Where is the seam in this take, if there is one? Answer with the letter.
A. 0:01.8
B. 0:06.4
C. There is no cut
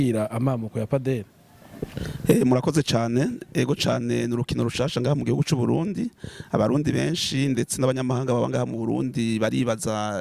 C